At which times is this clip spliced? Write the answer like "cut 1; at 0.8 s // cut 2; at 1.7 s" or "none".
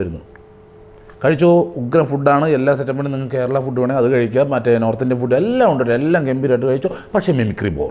none